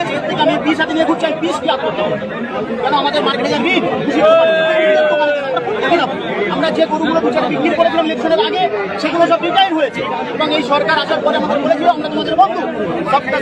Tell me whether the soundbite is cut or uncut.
uncut